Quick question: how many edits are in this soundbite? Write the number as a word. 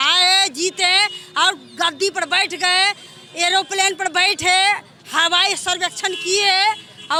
zero